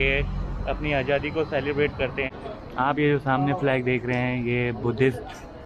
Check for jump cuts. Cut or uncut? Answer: cut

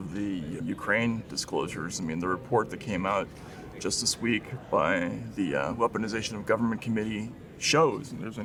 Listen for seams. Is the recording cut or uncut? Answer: uncut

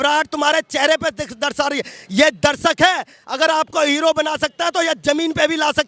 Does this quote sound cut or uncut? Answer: uncut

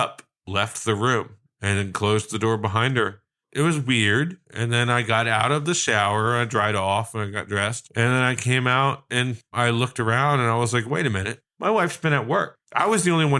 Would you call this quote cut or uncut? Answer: uncut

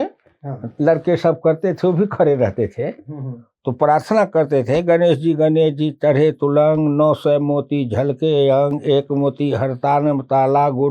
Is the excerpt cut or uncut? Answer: uncut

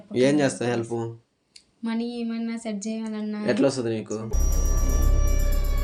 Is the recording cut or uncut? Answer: uncut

